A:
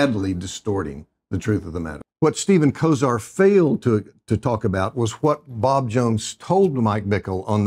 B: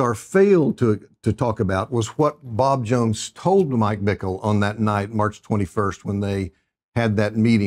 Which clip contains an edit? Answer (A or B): A